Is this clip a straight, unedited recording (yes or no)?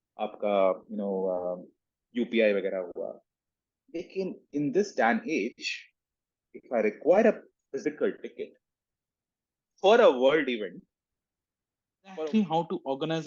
no